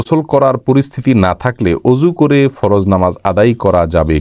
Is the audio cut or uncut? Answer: uncut